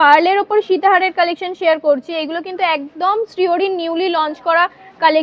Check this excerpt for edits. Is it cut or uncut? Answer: uncut